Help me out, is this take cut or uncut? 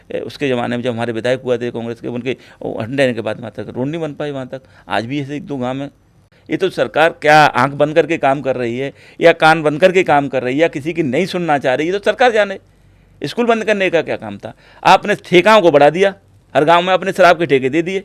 cut